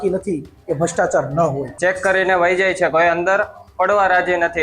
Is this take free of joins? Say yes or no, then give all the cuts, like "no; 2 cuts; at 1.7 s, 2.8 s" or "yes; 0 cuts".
no; 1 cut; at 1.7 s